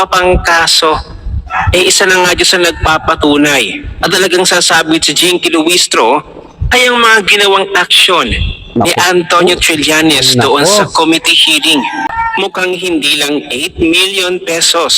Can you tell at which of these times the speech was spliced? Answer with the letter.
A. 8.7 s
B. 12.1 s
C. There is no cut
B